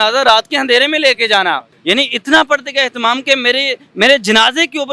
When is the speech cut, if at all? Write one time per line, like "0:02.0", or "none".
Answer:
0:01.7